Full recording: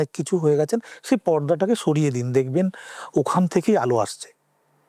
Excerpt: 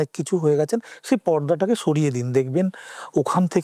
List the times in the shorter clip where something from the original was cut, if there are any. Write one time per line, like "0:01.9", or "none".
none